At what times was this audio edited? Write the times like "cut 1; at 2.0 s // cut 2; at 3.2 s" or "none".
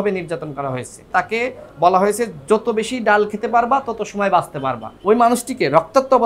cut 1; at 1.1 s // cut 2; at 4.9 s